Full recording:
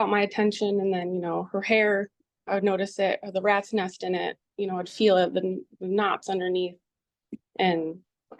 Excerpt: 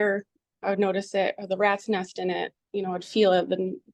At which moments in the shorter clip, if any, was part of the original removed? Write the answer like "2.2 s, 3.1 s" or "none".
none